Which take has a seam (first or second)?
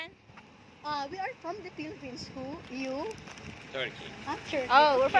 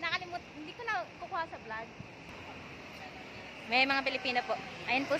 second